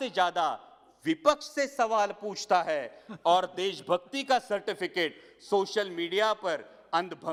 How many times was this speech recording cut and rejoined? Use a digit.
0